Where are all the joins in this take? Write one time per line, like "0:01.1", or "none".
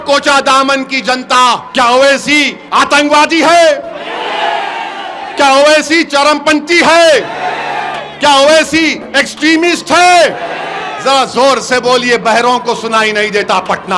0:01.7
0:02.6

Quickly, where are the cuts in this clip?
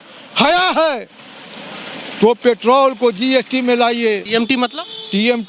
0:04.2

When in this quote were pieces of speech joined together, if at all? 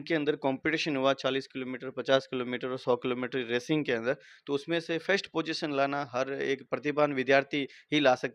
none

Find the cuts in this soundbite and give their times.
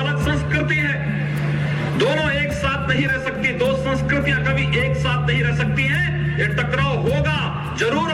none

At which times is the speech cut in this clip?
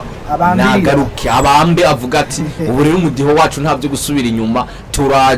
none

